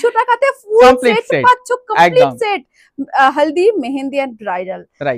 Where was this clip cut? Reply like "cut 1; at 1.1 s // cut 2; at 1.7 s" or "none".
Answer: none